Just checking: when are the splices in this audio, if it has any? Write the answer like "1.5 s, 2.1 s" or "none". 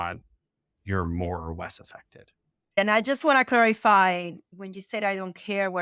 2.8 s